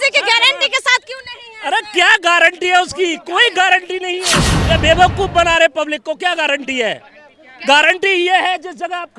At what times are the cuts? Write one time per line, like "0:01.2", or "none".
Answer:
0:04.3